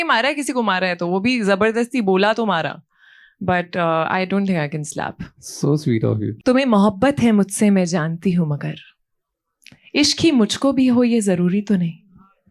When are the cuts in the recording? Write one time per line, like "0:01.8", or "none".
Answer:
0:06.4